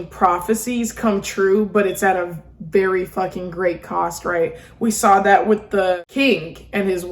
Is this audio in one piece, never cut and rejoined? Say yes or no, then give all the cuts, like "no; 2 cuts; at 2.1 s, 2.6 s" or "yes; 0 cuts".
no; 1 cut; at 6.0 s